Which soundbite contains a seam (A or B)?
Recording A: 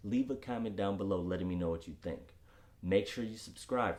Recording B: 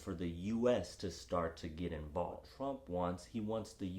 B